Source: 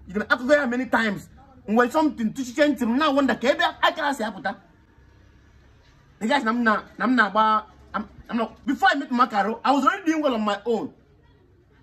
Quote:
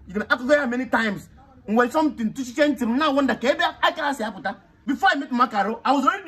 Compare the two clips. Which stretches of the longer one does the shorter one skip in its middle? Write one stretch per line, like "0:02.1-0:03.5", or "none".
0:04.8-0:08.6